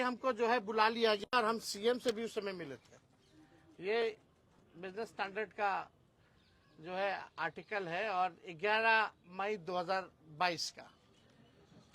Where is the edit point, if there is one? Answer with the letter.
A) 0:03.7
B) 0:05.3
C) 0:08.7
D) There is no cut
D